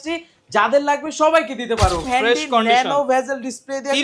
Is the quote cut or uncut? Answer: cut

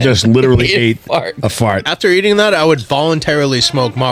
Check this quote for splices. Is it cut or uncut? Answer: cut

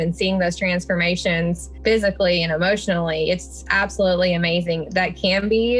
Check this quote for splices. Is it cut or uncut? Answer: cut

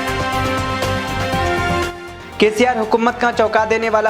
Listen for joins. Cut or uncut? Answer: cut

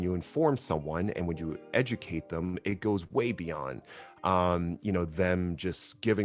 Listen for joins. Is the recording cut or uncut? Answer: uncut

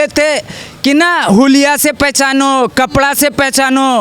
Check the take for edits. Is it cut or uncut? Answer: uncut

